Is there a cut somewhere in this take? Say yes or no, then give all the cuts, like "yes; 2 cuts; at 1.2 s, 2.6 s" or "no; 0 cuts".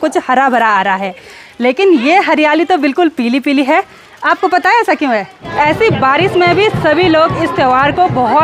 yes; 1 cut; at 5.5 s